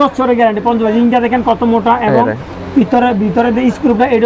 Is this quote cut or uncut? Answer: uncut